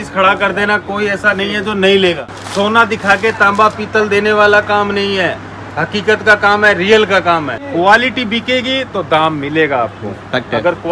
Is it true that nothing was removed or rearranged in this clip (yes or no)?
no